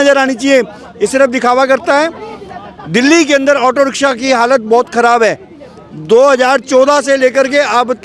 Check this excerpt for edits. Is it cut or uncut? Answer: uncut